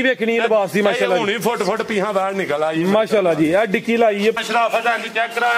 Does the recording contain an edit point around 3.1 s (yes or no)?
no